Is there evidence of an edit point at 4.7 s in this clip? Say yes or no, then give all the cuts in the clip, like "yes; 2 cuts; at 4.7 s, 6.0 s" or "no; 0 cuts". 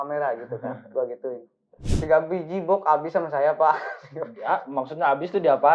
no; 1 cut; at 1.9 s